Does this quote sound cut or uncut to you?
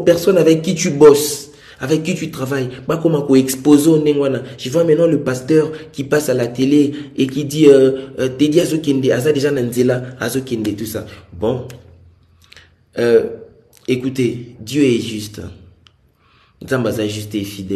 uncut